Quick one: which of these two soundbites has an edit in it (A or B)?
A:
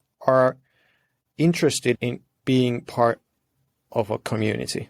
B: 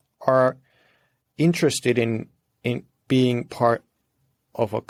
A